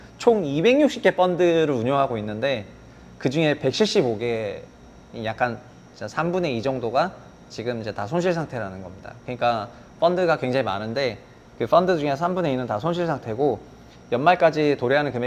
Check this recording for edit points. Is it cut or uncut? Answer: uncut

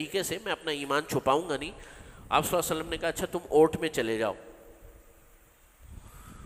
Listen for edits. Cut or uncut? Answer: uncut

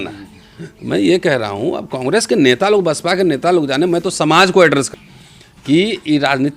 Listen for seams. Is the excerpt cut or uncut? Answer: cut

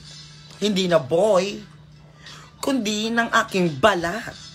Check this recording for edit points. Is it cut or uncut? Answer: uncut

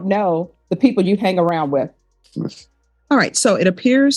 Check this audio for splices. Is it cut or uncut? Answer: cut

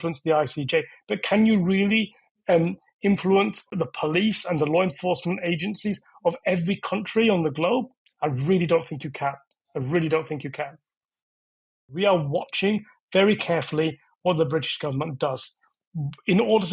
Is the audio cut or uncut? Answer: cut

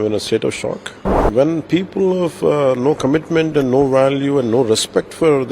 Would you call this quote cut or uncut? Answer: cut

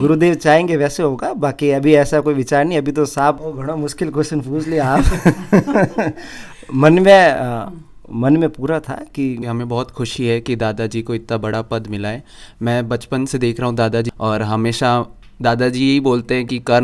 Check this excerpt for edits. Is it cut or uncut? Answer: cut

